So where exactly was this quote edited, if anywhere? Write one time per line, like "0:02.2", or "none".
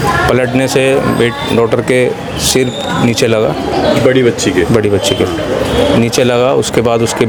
none